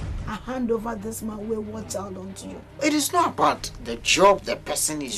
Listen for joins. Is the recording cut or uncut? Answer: cut